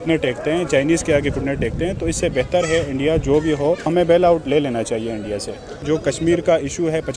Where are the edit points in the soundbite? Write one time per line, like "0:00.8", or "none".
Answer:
0:03.9
0:05.7